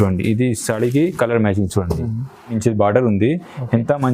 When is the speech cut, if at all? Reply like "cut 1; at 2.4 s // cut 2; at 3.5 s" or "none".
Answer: cut 1; at 2.5 s